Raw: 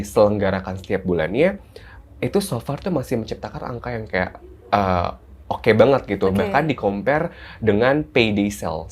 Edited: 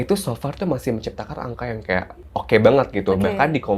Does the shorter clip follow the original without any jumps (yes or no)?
no